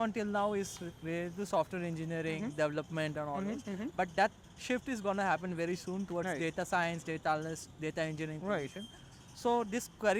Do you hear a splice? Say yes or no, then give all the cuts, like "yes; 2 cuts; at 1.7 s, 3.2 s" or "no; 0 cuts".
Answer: no; 0 cuts